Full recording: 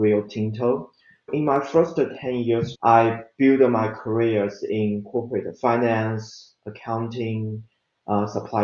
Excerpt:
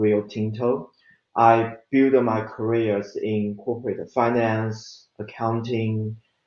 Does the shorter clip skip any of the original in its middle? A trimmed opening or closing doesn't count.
yes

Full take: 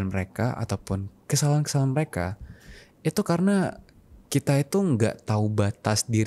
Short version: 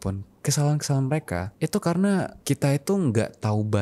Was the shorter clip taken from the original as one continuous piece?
no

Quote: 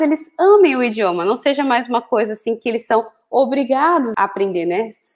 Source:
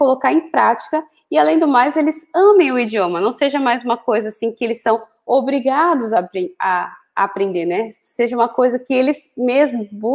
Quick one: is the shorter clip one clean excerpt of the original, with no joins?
no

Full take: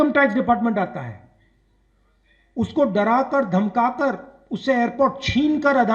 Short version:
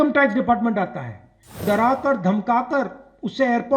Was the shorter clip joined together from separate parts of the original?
yes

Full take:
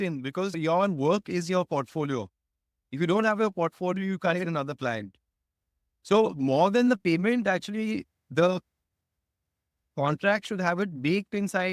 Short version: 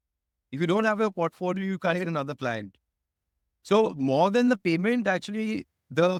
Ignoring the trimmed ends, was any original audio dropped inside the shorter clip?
no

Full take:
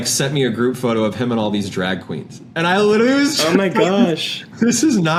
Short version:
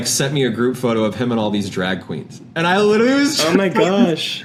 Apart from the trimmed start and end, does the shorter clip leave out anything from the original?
no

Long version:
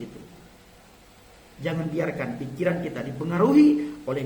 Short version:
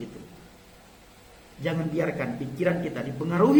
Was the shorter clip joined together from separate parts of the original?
no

